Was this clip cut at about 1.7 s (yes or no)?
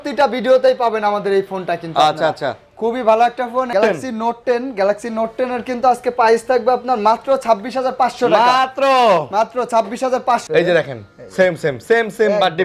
no